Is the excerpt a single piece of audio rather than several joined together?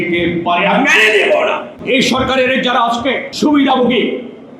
no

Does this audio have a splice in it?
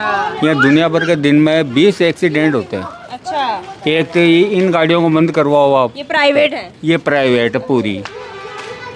no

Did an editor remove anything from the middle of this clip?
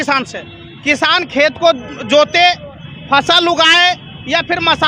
no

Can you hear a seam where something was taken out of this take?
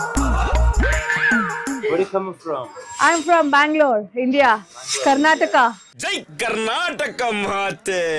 no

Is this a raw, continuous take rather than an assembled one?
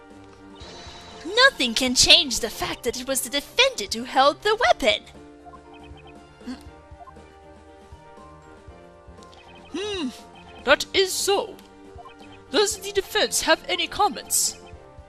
no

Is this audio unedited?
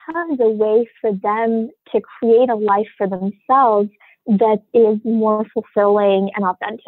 yes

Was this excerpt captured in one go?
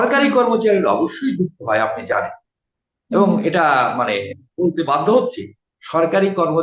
yes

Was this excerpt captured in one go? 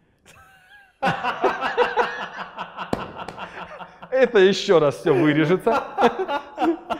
yes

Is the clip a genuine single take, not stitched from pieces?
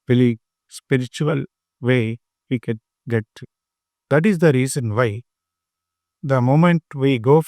yes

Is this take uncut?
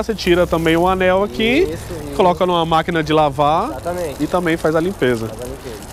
yes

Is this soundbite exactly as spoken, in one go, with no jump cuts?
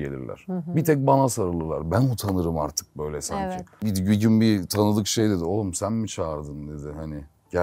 no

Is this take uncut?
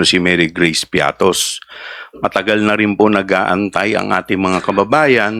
yes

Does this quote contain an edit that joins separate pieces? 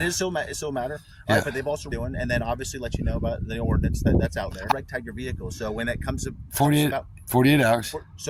yes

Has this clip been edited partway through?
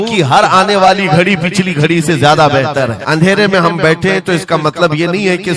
yes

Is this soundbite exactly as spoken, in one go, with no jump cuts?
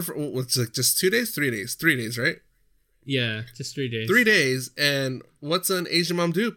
yes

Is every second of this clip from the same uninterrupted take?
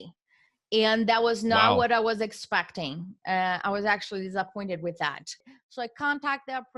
no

